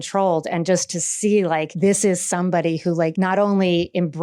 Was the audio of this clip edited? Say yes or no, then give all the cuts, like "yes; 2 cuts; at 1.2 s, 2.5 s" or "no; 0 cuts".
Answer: yes; 2 cuts; at 1.7 s, 3.1 s